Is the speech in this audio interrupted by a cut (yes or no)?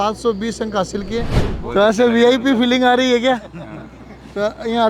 yes